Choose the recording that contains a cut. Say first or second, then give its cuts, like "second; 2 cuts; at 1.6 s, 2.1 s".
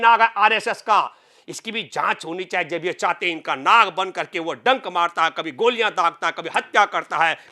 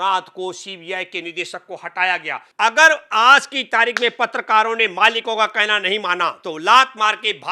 second; 2 cuts; at 2.4 s, 6.4 s